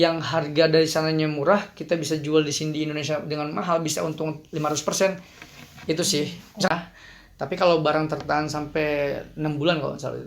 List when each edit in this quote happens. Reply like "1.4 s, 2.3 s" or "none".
6.7 s